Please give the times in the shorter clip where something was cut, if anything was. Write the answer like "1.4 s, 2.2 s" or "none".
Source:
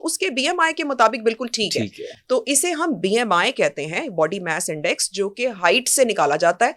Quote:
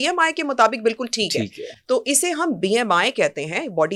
none